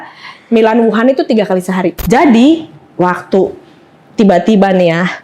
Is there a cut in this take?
yes; 1 cut; at 2.0 s

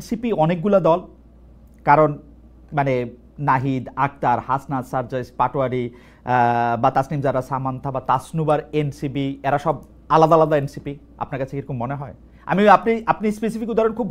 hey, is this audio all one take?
yes; 0 cuts

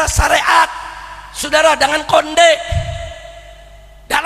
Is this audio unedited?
yes; 0 cuts

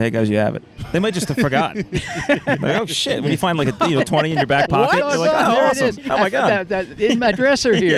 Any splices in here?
no; 0 cuts

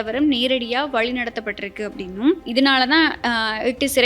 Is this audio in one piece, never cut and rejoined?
no; 1 cut; at 2.4 s

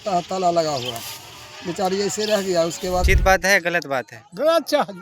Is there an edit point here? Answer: yes; 1 cut; at 3.1 s

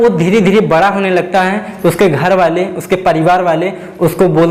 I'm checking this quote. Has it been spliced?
no; 0 cuts

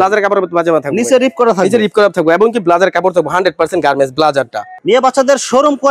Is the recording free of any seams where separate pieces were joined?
no; 1 cut; at 4.7 s

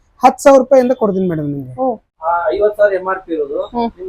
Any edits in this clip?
yes; 1 cut; at 2.2 s

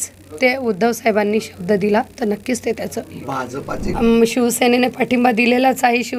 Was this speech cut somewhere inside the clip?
yes; 1 cut; at 3.9 s

